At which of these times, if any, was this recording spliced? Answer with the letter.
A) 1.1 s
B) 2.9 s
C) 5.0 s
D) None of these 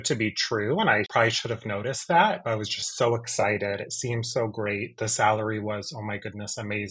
A